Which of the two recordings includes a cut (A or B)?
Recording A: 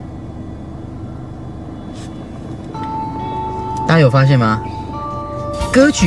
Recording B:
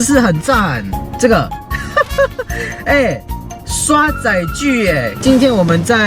B